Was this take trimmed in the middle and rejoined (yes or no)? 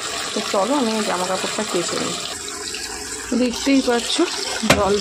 no